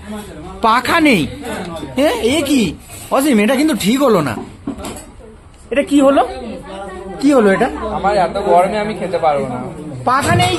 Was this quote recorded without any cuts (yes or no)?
yes